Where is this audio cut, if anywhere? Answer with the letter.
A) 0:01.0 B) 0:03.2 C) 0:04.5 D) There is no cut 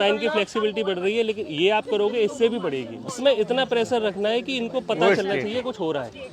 B